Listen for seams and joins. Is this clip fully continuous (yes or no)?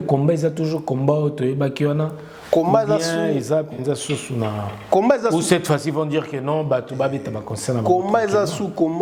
yes